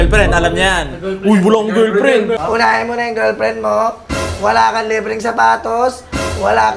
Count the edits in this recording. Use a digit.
1